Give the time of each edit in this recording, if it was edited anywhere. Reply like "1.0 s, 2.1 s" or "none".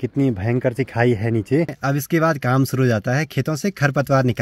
1.8 s